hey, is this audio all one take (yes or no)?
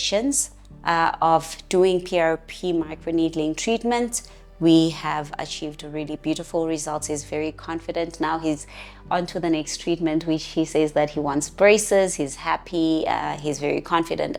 yes